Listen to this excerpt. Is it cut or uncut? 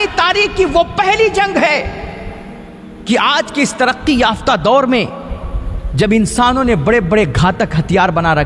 uncut